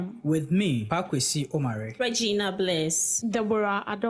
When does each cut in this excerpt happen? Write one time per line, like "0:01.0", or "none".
none